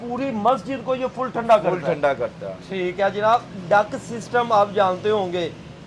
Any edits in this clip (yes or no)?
no